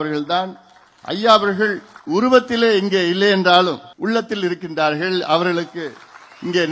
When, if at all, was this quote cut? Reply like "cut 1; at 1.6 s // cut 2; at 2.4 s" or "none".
cut 1; at 1.9 s // cut 2; at 3.9 s